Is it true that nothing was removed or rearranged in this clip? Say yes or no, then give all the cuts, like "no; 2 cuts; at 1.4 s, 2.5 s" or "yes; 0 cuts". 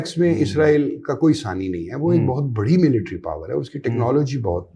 yes; 0 cuts